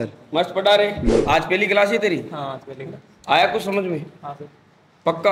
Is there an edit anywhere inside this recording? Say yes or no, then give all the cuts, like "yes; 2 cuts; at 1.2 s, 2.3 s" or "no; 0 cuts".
yes; 1 cut; at 1.2 s